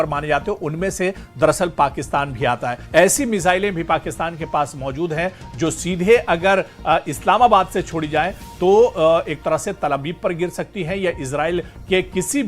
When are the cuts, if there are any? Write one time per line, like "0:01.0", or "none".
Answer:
0:02.8